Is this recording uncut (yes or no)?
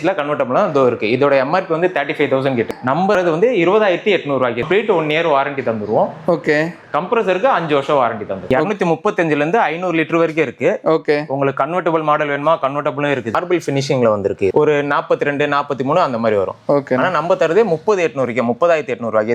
no